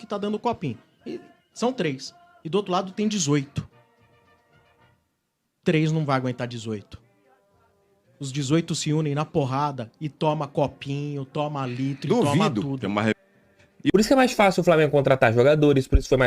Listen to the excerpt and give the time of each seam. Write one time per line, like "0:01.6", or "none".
0:13.9